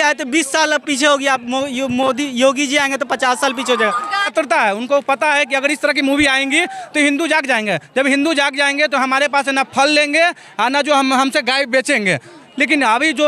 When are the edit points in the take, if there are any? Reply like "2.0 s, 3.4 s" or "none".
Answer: 4.3 s